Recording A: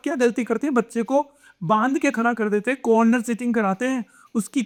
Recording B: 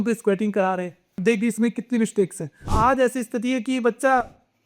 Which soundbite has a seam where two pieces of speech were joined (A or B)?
B